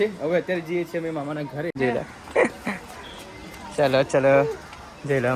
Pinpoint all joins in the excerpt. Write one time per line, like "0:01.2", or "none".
0:01.7